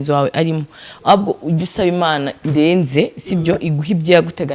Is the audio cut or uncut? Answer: uncut